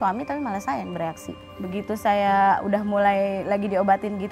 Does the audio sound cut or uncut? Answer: cut